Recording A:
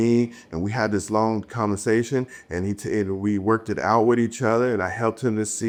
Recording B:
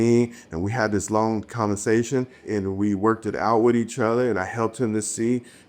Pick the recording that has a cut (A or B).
B